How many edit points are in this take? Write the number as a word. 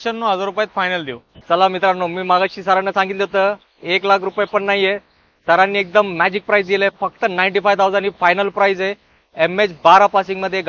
zero